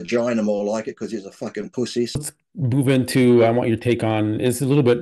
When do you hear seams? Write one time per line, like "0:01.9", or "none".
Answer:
0:02.2